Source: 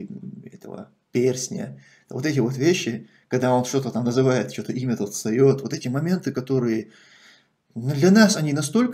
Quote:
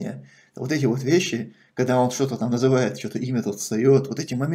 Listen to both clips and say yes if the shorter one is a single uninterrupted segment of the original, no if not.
yes